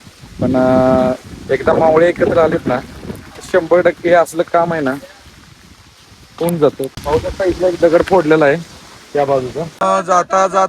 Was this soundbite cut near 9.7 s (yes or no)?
yes